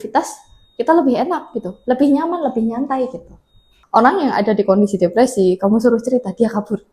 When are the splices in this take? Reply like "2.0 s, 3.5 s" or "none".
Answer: 3.7 s